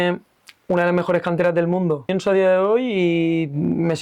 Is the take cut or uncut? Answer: cut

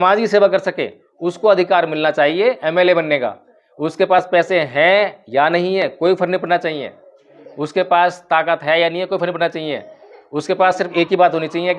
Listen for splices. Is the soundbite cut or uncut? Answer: uncut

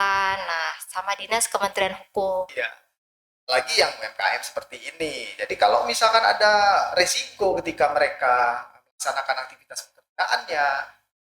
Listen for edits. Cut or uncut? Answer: cut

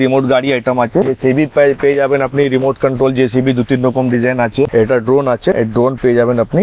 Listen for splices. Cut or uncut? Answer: cut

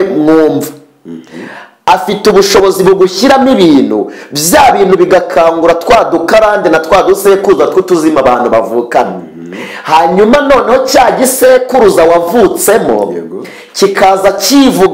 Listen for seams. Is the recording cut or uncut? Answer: uncut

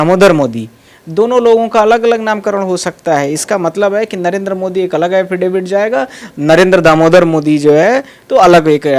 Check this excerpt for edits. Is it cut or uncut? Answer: uncut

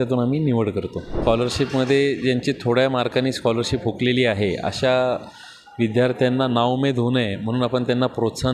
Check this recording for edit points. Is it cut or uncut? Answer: cut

